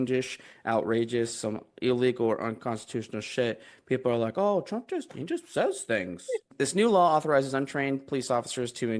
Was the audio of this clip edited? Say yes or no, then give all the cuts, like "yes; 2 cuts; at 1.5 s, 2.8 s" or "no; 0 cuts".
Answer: yes; 1 cut; at 6.5 s